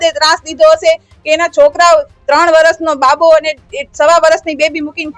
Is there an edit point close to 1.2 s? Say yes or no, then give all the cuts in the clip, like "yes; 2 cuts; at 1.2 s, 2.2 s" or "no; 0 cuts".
no; 0 cuts